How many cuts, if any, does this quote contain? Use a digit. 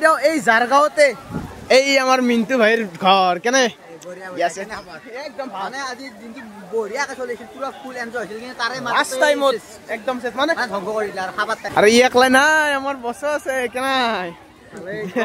1